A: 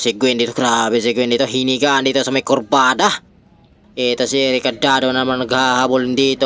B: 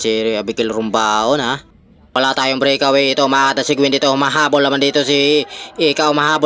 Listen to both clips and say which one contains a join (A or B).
B